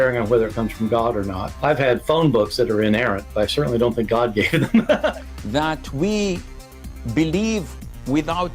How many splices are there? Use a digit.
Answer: 1